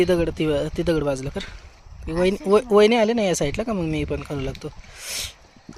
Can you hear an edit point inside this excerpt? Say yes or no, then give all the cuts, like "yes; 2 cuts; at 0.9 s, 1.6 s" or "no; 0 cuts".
no; 0 cuts